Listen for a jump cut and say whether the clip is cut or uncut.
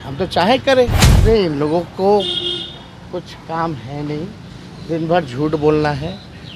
cut